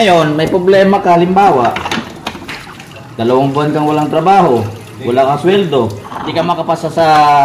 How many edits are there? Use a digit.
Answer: 1